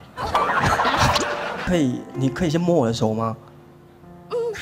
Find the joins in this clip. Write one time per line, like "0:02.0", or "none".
0:01.7